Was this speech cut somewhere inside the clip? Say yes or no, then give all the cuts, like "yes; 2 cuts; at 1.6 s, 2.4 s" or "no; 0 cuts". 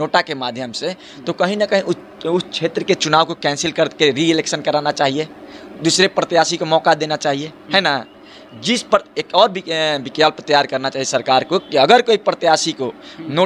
no; 0 cuts